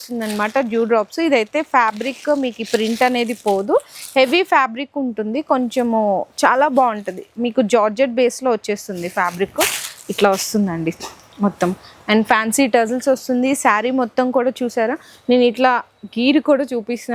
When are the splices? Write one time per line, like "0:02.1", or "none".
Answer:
none